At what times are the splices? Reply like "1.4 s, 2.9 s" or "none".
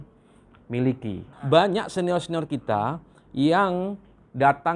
1.3 s